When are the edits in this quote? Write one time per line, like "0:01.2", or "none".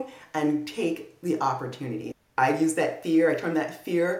0:02.3